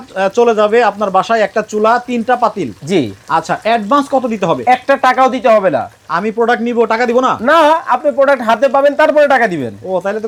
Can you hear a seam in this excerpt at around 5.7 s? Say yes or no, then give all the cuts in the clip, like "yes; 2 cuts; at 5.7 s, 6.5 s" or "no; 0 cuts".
no; 0 cuts